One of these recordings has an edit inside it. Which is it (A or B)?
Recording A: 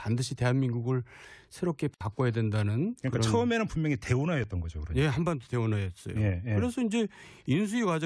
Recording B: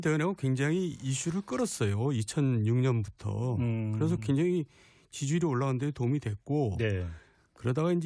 A